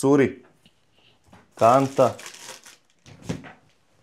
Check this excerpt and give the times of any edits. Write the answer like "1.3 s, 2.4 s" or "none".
none

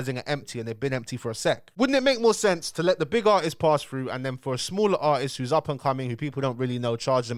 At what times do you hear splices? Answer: none

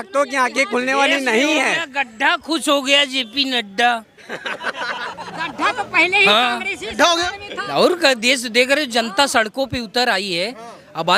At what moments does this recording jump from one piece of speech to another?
none

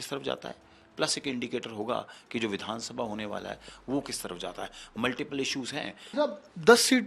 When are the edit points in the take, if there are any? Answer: 6.1 s

